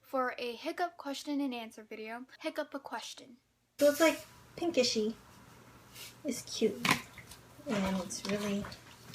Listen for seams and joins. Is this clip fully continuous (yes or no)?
no